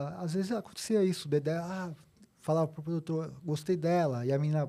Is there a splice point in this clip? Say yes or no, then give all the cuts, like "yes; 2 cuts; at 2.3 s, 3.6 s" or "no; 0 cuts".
no; 0 cuts